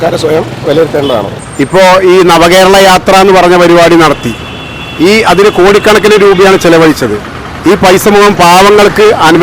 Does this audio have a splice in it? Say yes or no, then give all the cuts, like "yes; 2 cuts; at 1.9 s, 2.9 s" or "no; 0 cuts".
yes; 1 cut; at 1.4 s